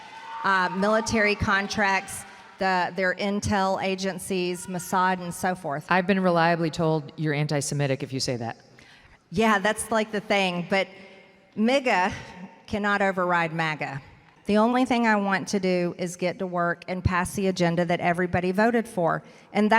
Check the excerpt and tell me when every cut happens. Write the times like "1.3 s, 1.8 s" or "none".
14.2 s